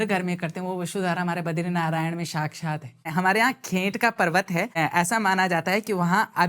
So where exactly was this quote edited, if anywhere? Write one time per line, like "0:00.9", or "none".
0:03.1
0:04.7